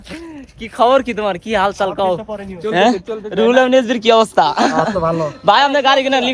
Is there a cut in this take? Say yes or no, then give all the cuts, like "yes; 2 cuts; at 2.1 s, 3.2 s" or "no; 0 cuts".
no; 0 cuts